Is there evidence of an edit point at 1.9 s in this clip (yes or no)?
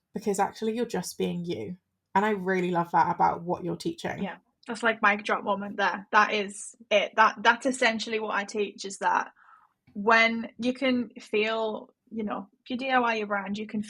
no